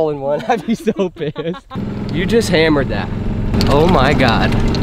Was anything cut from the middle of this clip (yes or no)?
no